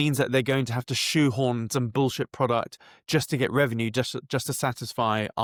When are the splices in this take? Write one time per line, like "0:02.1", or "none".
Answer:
none